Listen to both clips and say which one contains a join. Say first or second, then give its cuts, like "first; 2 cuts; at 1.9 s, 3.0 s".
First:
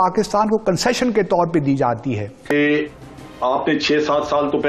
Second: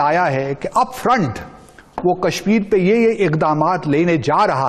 first; 1 cut; at 2.5 s